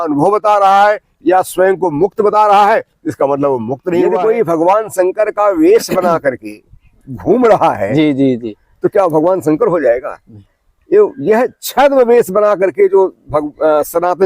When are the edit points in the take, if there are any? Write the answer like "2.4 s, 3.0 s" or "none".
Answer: 4.1 s